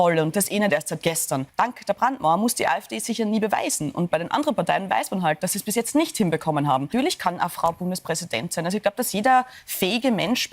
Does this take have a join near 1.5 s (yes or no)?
yes